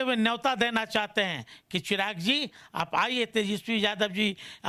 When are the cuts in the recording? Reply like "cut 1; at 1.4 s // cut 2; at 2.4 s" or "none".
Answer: none